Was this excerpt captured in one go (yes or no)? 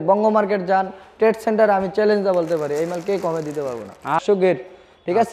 no